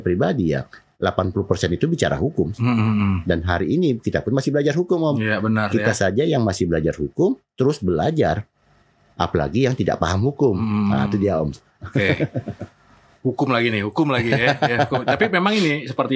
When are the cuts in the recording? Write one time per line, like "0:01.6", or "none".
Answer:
none